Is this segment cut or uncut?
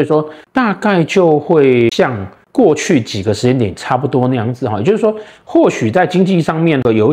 uncut